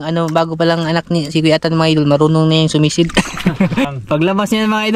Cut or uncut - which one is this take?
cut